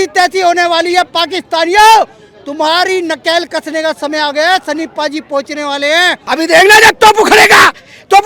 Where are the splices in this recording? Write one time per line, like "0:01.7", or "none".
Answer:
0:06.2